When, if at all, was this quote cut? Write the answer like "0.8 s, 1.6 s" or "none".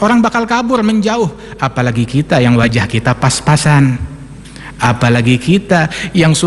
none